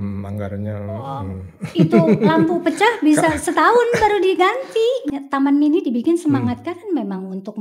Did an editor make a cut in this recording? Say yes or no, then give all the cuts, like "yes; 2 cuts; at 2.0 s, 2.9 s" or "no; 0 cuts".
yes; 1 cut; at 5.0 s